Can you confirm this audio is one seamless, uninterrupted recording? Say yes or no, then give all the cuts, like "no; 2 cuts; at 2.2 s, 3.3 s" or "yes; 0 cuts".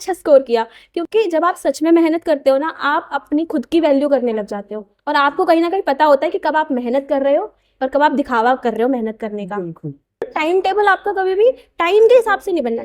no; 1 cut; at 10.3 s